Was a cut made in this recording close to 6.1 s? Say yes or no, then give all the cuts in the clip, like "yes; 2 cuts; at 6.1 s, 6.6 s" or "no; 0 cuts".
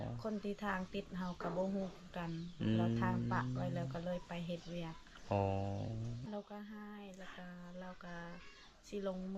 yes; 1 cut; at 6.1 s